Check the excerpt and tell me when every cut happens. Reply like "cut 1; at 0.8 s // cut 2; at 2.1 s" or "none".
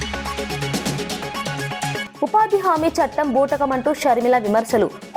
cut 1; at 2.0 s